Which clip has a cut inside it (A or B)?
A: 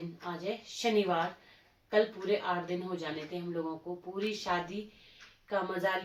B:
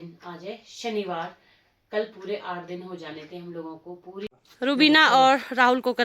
B